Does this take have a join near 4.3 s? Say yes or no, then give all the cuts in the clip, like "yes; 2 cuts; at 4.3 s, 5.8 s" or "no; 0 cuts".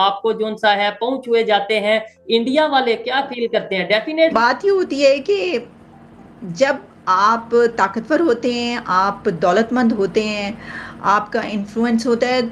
yes; 1 cut; at 4.3 s